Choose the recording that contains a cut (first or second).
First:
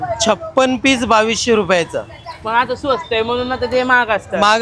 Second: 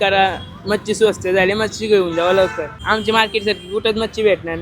second